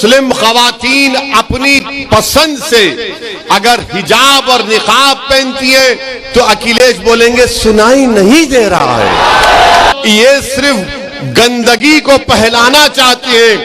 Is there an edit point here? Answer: yes; 1 cut; at 9.9 s

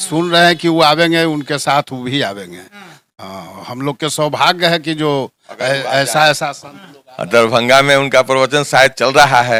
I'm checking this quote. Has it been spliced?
no; 0 cuts

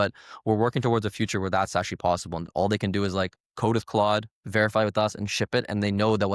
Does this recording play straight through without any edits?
no; 1 cut; at 2.4 s

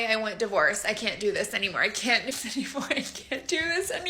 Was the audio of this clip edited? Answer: yes; 1 cut; at 2.3 s

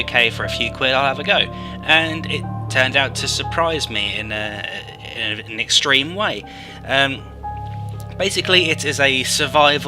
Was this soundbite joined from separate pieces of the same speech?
yes; 1 cut; at 4.5 s

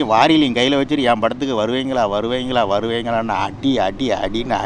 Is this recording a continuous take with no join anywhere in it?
yes; 0 cuts

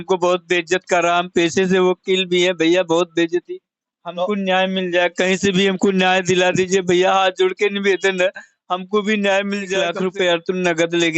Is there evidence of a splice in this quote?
yes; 1 cut; at 10.1 s

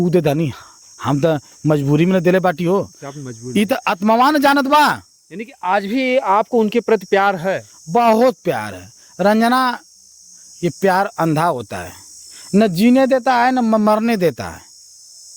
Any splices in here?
no; 0 cuts

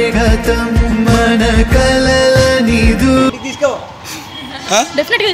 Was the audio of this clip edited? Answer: yes; 1 cut; at 3.3 s

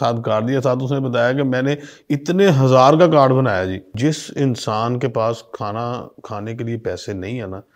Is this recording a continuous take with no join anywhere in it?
no; 1 cut; at 3.9 s

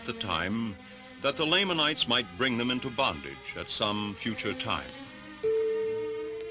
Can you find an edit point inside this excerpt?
yes; 1 cut; at 4.0 s

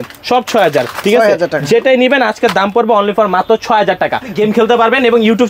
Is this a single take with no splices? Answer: no; 1 cut; at 4.3 s

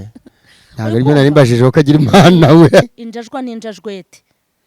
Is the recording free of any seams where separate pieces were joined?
no; 1 cut; at 2.8 s

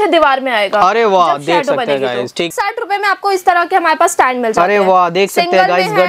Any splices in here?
yes; 1 cut; at 2.5 s

